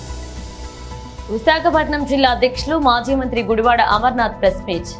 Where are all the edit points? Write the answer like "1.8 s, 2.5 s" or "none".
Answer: 0.9 s